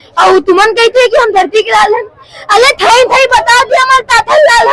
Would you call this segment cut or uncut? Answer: uncut